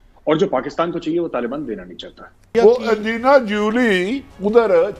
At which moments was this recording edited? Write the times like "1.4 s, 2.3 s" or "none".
2.3 s

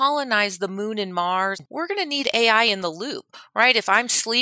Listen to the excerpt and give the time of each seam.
1.7 s

